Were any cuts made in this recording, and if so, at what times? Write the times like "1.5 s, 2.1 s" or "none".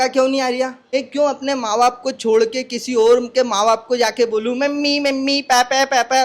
0.9 s

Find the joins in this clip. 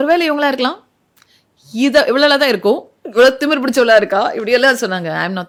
none

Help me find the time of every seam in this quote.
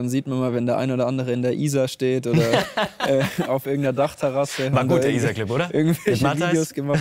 none

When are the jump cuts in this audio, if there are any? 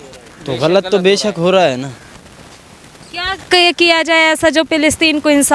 none

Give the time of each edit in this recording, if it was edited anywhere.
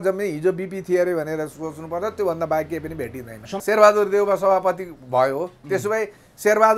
3.6 s

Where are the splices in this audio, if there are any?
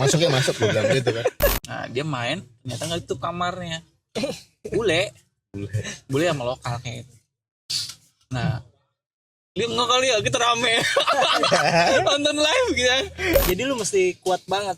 1.6 s, 13.4 s

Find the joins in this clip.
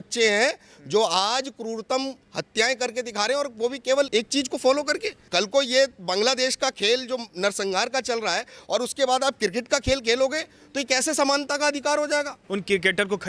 4.1 s, 5.1 s, 12.4 s

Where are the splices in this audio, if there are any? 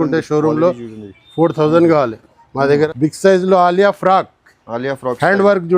2.9 s

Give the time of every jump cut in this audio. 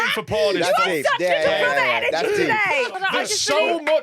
2.9 s

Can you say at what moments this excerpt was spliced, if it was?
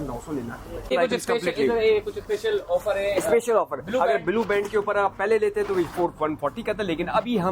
0.9 s

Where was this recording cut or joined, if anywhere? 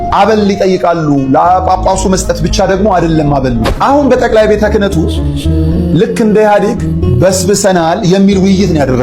3.7 s

